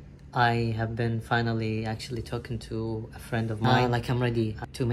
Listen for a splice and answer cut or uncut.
cut